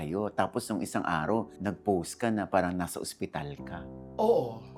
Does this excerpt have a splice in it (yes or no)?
no